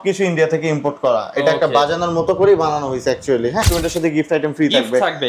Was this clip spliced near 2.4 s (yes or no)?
no